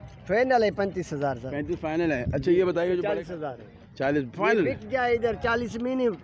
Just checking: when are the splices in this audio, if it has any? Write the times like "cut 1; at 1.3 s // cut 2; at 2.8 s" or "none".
cut 1; at 3.0 s